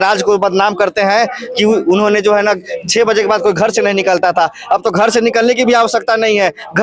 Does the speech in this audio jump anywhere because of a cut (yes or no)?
no